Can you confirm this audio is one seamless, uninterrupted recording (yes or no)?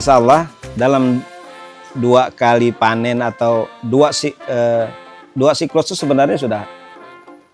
yes